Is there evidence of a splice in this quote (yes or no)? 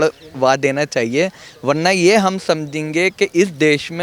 no